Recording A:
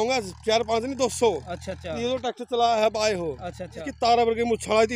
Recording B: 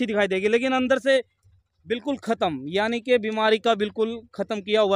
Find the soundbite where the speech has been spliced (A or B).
A